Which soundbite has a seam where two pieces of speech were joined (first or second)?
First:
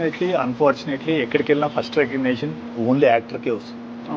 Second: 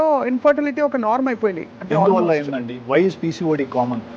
second